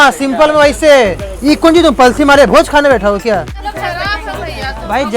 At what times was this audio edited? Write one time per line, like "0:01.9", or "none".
0:03.6